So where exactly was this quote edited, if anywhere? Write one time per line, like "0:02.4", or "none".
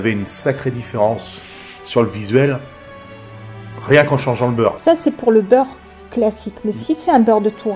0:04.8